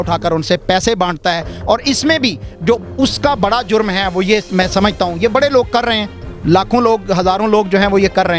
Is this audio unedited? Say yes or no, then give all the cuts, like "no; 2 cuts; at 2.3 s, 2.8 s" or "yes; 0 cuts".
yes; 0 cuts